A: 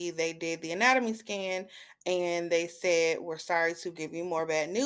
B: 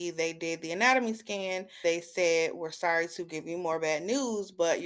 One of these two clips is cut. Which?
B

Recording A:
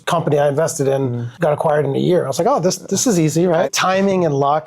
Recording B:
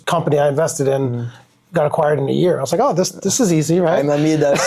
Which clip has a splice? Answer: A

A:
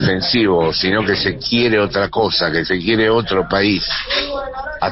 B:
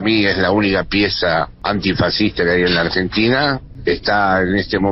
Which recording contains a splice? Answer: B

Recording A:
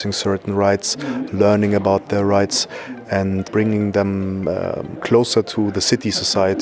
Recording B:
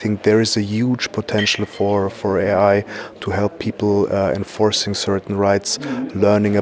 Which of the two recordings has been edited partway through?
A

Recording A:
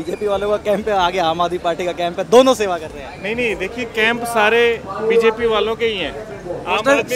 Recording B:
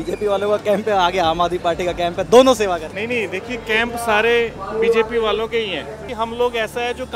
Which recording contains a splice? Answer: B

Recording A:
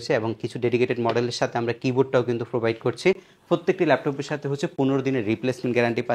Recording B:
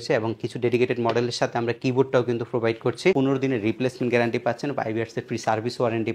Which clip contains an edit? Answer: B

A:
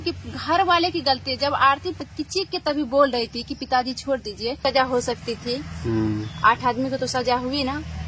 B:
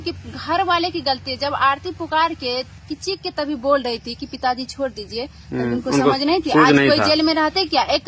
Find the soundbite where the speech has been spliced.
A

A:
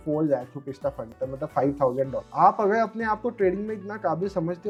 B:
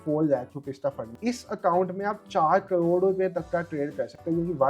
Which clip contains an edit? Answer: B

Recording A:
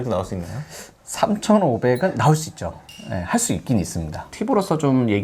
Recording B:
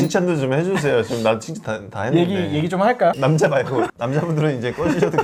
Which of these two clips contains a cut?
A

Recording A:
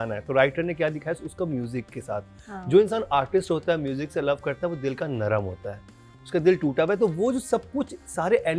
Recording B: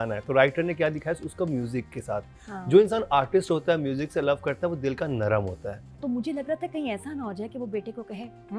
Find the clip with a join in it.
B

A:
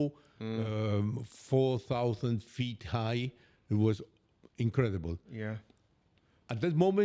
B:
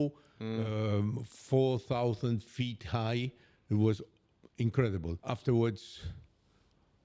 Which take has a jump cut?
B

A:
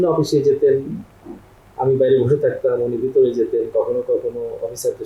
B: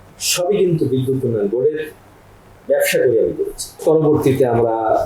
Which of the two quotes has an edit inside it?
B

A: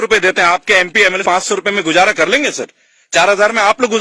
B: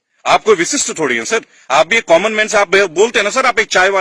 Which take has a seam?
A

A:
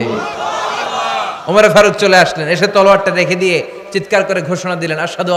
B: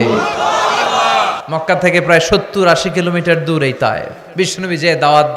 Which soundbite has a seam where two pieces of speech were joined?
B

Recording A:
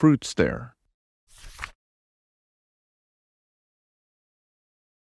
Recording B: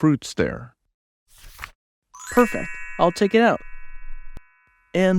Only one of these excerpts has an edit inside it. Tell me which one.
B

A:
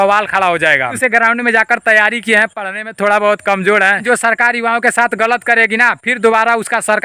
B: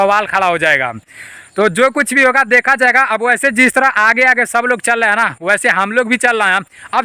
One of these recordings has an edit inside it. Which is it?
A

